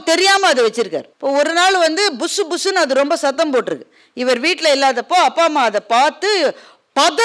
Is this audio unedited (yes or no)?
no